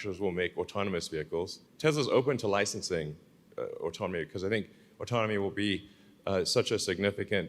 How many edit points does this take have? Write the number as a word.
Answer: one